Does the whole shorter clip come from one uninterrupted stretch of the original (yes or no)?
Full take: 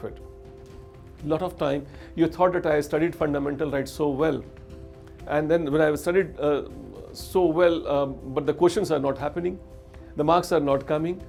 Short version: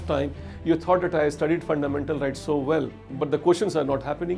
no